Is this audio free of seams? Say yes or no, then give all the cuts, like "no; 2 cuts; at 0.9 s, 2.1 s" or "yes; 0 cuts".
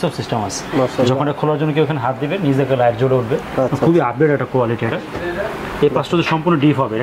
yes; 0 cuts